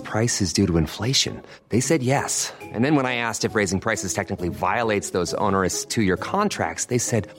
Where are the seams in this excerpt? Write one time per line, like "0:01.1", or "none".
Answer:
none